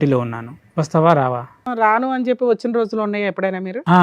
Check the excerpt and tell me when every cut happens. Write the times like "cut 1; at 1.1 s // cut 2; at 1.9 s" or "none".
cut 1; at 1.7 s